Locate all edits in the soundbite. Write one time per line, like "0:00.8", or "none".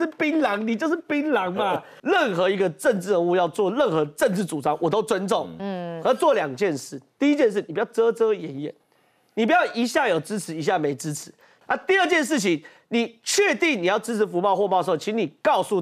0:01.9
0:11.5

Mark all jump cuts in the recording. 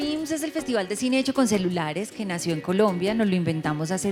none

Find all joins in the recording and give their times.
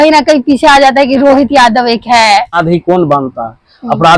0:02.6

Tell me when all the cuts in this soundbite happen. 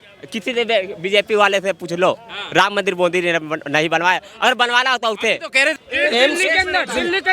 0:05.8

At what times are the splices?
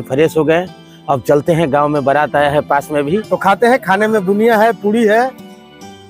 0:03.2

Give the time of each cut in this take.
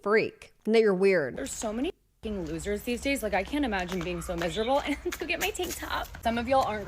0:01.3

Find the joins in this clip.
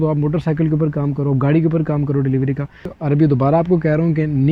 0:03.0

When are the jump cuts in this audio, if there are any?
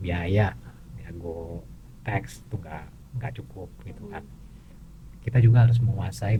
none

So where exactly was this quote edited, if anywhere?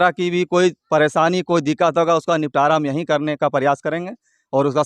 none

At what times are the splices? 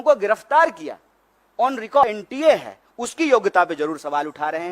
0:02.0

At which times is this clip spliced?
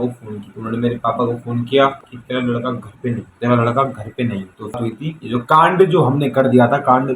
0:02.0
0:04.8

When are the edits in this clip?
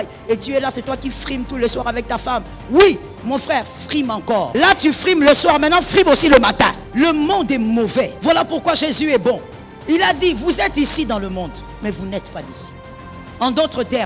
0:04.5
0:06.8
0:08.1

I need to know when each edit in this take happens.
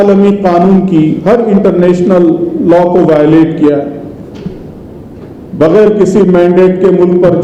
none

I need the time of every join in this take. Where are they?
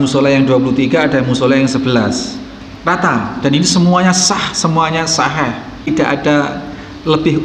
0:05.9

